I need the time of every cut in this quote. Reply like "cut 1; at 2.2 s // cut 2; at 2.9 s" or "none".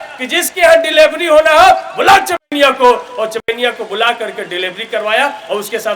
none